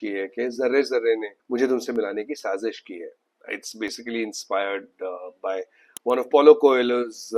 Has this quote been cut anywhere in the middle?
no; 0 cuts

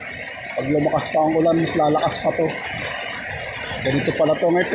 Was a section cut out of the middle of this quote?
no; 0 cuts

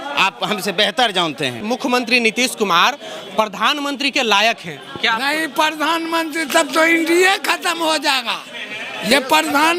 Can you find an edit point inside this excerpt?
yes; 1 cut; at 1.6 s

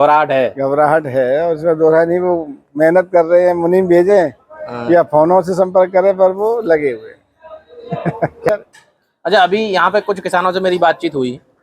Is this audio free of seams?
no; 1 cut; at 8.5 s

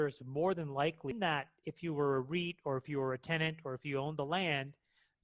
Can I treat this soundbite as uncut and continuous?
no; 1 cut; at 1.1 s

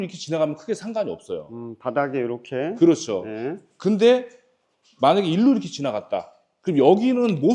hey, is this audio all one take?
yes; 0 cuts

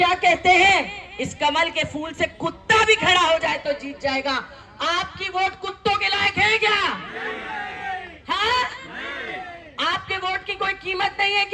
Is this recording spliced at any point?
no; 0 cuts

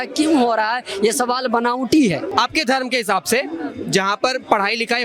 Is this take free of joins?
no; 1 cut; at 2.3 s

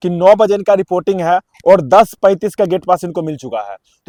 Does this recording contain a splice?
no; 0 cuts

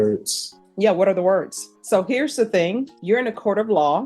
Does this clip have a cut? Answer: yes; 2 cuts; at 1.7 s, 2.9 s

